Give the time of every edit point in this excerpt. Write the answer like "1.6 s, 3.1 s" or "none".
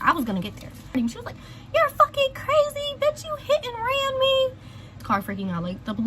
0.9 s, 5.0 s